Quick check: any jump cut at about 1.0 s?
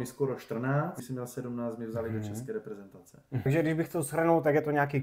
yes; 2 cuts; at 1.0 s, 3.5 s

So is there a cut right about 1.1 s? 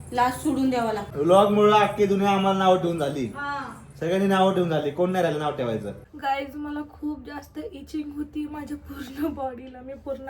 yes; 2 cuts; at 1.1 s, 6.0 s

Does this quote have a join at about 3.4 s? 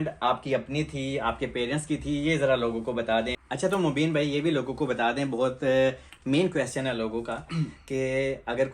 yes; 1 cut; at 3.4 s

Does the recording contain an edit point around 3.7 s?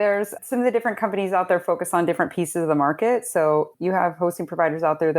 yes; 1 cut; at 3.7 s

